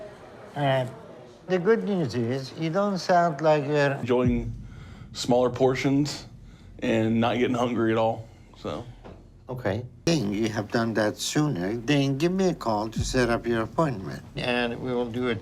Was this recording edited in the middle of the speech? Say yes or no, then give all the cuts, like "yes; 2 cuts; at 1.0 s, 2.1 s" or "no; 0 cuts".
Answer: yes; 2 cuts; at 4.1 s, 10.0 s